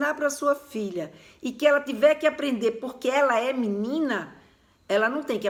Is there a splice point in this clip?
no; 0 cuts

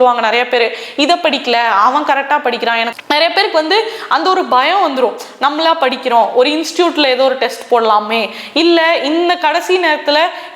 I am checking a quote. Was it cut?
yes; 1 cut; at 2.9 s

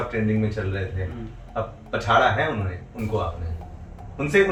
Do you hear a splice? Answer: no; 0 cuts

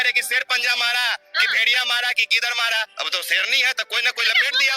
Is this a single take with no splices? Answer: no; 1 cut; at 3.0 s

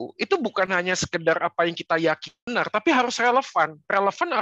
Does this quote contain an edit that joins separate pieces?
yes; 1 cut; at 2.3 s

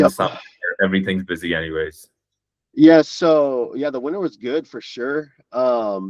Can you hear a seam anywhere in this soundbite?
no; 0 cuts

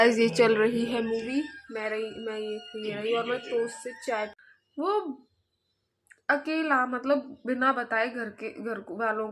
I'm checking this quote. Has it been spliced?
yes; 1 cut; at 4.4 s

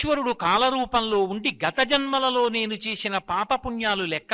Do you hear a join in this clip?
no; 0 cuts

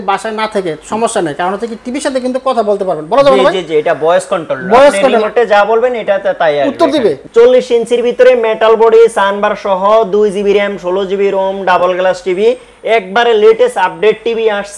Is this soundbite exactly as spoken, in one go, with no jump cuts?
no; 1 cut; at 7.2 s

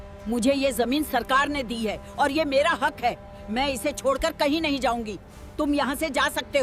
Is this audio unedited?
yes; 0 cuts

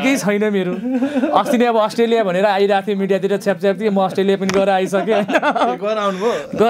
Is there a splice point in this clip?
no; 0 cuts

